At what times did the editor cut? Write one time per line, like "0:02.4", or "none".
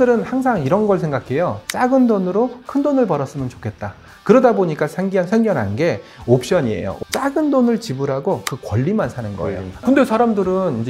0:01.6
0:07.0
0:09.7